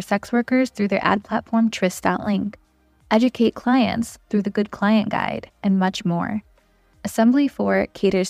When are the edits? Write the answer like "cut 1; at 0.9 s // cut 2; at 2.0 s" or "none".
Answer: none